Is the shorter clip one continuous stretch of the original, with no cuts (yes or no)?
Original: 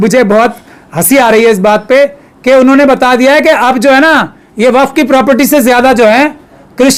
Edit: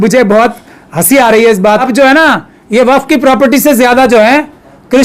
no